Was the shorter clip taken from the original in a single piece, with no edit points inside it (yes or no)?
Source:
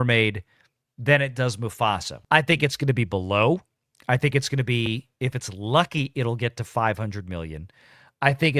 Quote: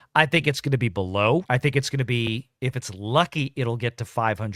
no